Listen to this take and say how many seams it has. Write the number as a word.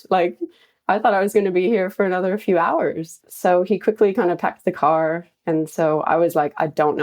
zero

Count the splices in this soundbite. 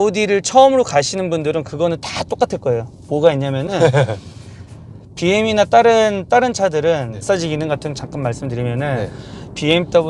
one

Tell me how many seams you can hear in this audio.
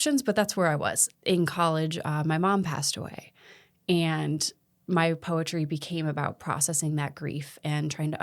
one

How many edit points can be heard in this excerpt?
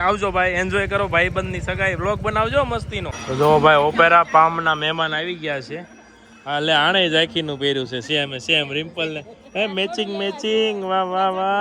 one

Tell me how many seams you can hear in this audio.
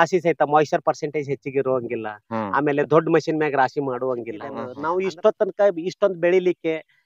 one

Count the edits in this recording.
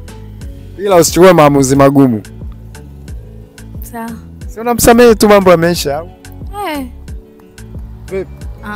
three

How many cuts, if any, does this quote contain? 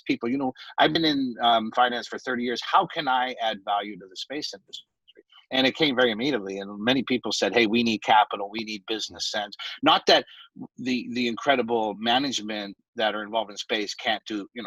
zero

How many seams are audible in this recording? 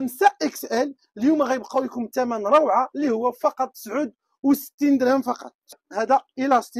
one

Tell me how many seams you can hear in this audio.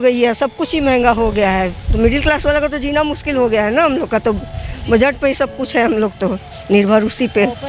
zero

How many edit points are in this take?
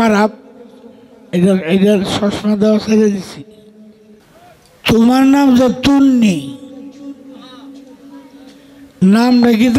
one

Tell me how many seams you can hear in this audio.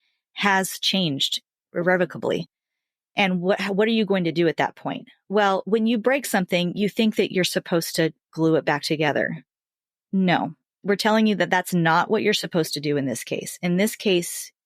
one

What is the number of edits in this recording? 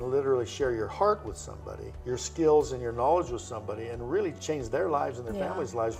zero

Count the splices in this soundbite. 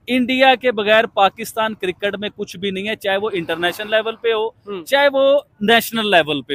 zero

